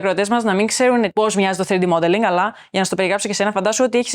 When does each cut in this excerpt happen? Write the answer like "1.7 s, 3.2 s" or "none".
1.1 s